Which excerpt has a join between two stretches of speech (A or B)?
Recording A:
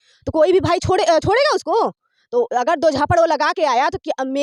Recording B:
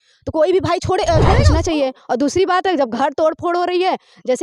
B